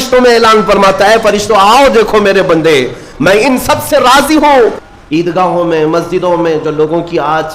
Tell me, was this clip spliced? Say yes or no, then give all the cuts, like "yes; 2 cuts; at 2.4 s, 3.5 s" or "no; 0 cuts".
yes; 1 cut; at 4.8 s